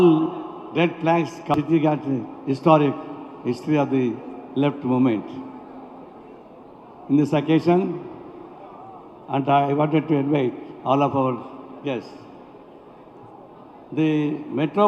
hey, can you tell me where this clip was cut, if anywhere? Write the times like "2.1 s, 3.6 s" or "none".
1.6 s